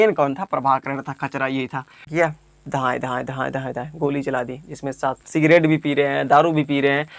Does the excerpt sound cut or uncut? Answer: cut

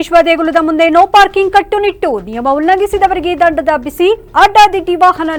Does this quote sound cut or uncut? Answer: uncut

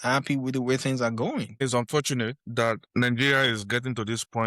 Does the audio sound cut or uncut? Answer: cut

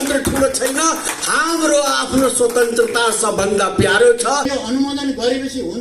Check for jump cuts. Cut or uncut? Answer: cut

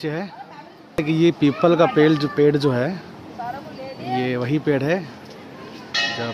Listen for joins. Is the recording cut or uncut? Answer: cut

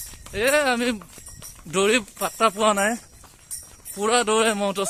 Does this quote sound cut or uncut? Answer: uncut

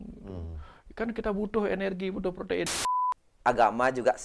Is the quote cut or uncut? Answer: cut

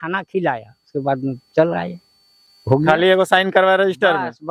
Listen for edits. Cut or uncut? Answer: uncut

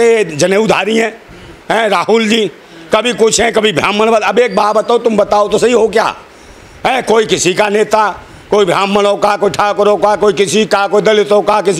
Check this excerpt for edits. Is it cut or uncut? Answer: uncut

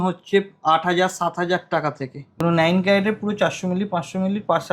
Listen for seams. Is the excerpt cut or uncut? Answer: cut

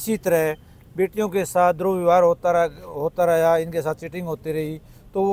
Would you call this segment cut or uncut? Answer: uncut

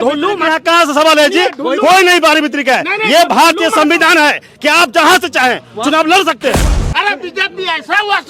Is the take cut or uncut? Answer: cut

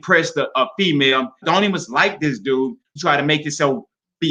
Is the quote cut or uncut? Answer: cut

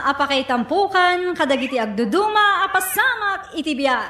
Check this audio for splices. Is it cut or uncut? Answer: uncut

